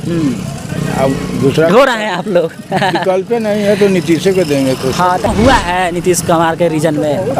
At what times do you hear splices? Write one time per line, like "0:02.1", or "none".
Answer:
0:05.3